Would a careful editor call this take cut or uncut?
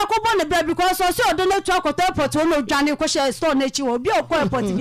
uncut